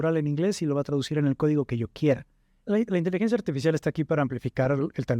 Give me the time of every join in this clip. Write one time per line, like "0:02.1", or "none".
0:02.5